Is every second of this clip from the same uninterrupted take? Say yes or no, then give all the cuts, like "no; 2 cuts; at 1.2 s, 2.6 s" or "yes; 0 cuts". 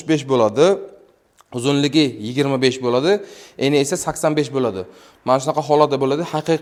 yes; 0 cuts